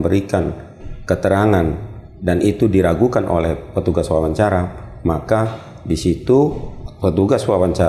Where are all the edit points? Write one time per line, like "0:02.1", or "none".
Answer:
none